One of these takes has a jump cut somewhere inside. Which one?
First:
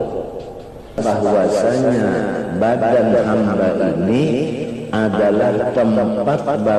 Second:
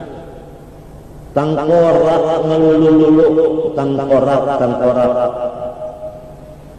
first; 1 cut; at 1.0 s

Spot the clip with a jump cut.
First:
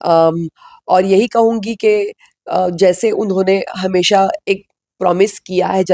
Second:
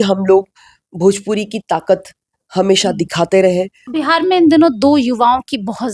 second; 1 cut; at 3.8 s

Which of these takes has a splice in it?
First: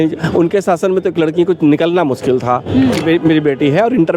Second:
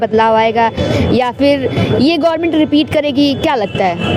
first; 1 cut; at 3.0 s

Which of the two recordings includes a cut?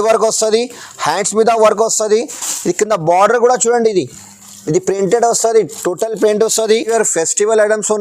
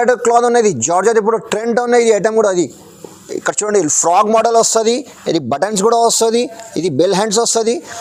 first; 1 cut; at 6.9 s

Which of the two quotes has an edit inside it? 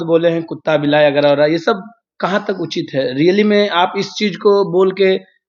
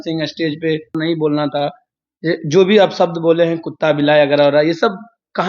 second; 1 cut; at 1.0 s

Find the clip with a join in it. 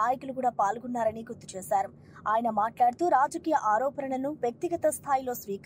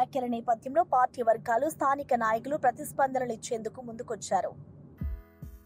second; 1 cut; at 4.7 s

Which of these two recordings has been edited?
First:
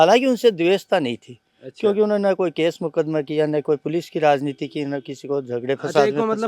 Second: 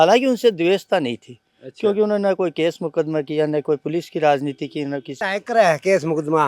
second; 1 cut; at 5.2 s

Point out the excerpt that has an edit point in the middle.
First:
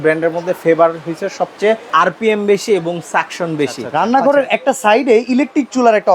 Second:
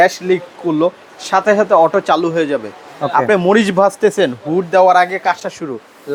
first; 2 cuts; at 1.9 s, 3.8 s

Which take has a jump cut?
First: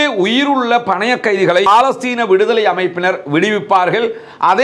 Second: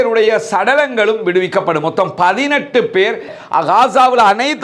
second; 1 cut; at 3.3 s

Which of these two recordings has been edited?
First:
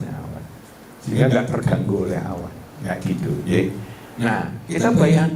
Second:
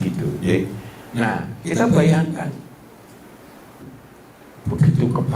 second; 1 cut; at 3.8 s

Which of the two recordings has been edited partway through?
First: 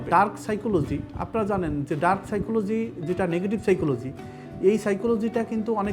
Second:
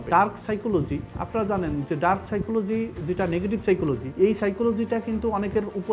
second; 1 cut; at 4.1 s

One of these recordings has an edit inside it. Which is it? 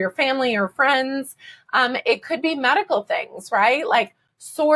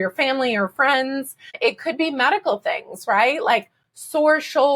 second; 1 cut; at 1.5 s

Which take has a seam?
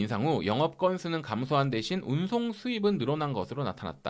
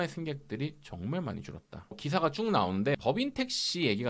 second; 2 cuts; at 1.9 s, 3.0 s

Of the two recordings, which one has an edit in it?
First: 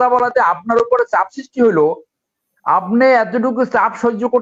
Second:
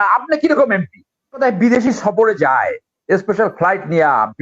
second; 1 cut; at 1.4 s

